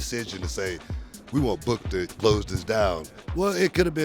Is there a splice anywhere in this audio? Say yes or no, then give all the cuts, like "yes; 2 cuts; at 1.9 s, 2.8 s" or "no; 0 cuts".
yes; 1 cut; at 3.0 s